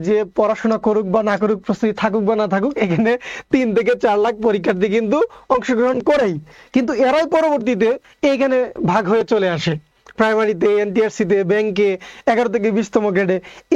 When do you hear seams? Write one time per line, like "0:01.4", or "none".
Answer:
none